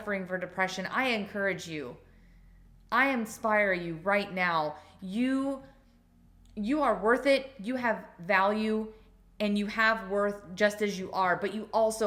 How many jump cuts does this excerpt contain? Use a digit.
0